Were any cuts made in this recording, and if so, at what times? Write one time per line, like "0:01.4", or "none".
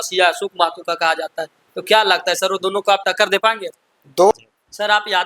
0:04.3